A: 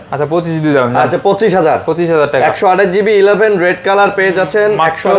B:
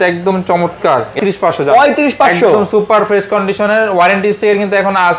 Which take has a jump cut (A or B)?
B